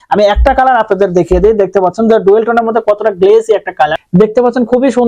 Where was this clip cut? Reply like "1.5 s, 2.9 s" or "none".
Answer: 4.0 s